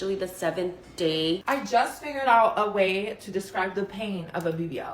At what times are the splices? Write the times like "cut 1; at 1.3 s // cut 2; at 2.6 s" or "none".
cut 1; at 1.4 s